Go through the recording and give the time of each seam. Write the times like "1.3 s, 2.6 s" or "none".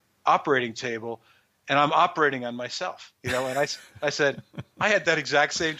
none